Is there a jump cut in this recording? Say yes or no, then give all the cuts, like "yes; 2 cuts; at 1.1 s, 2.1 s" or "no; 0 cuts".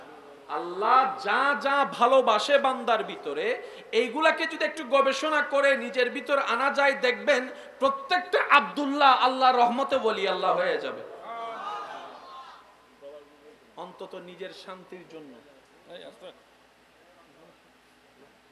no; 0 cuts